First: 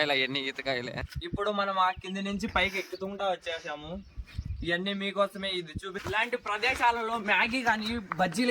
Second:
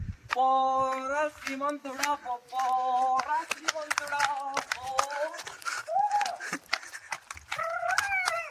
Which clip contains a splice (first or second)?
first